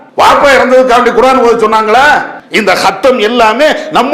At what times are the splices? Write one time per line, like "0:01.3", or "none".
0:02.4